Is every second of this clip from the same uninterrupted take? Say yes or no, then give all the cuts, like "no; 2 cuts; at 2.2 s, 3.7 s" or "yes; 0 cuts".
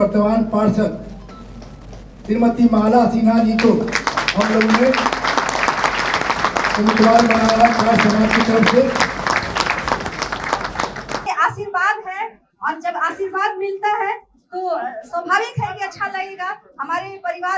no; 1 cut; at 11.2 s